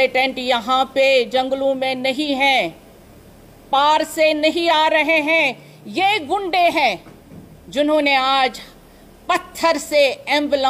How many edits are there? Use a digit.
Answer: 0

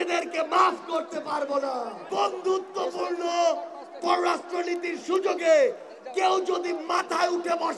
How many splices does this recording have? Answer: 1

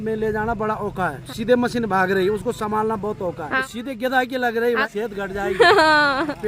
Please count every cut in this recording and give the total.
3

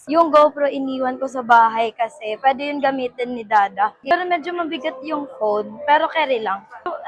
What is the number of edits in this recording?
1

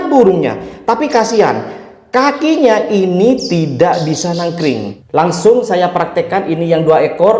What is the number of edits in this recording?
1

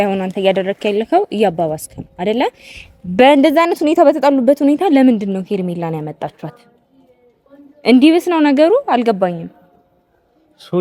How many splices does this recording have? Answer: 0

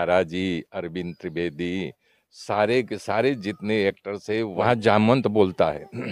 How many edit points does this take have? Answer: 1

